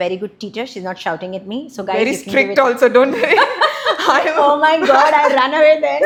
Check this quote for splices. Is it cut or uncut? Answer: uncut